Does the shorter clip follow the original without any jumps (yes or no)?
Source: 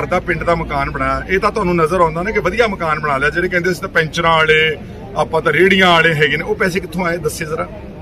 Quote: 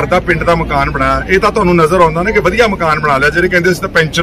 yes